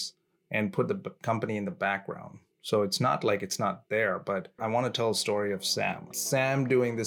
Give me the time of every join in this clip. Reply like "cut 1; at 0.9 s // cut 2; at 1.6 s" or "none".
cut 1; at 4.6 s // cut 2; at 6.1 s